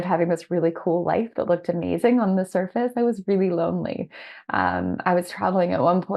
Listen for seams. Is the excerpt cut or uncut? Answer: uncut